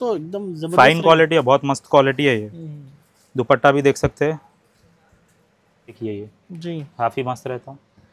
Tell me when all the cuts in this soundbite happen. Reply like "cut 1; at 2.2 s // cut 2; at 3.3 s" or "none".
cut 1; at 6.0 s

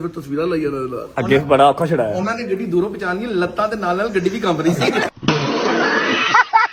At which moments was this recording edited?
none

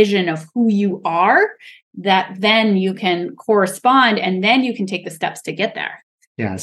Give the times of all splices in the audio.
none

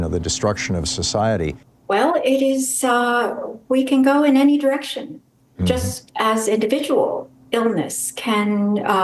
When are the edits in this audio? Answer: cut 1; at 1.7 s

